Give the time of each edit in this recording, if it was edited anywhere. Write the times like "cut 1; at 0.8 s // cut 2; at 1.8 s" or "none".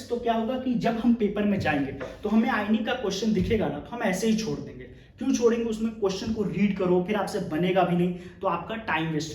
none